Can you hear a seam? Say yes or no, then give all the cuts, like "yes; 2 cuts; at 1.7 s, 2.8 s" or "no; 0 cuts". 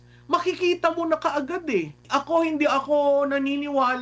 yes; 1 cut; at 2.1 s